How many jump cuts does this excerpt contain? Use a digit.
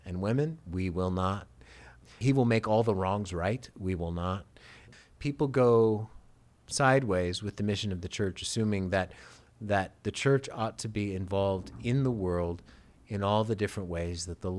2